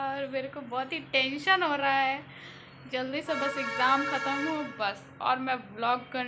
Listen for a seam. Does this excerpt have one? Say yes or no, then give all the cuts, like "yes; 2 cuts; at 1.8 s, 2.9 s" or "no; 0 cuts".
no; 0 cuts